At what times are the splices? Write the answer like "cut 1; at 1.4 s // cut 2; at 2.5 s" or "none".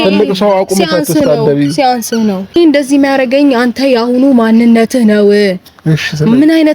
cut 1; at 2.6 s